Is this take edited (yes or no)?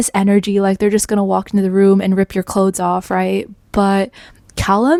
no